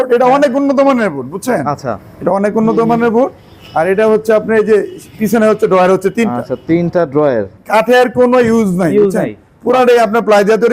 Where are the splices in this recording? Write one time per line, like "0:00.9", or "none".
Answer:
0:07.8